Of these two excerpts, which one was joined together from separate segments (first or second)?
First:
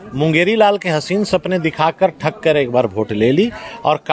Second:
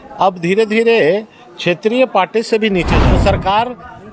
second